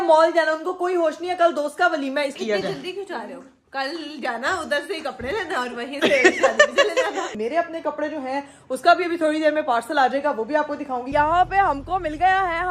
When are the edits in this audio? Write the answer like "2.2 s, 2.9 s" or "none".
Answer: 2.3 s, 7.3 s, 11.1 s